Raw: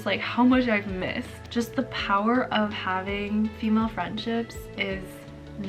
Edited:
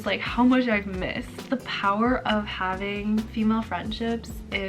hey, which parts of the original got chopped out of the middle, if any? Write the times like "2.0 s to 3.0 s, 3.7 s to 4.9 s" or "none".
1.4 s to 1.7 s